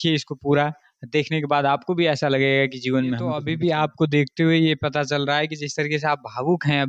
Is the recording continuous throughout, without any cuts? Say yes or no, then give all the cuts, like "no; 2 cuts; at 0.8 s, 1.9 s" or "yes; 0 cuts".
no; 1 cut; at 3.5 s